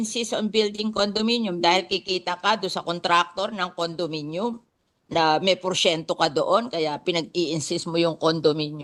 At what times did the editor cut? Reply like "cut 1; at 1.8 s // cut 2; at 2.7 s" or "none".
none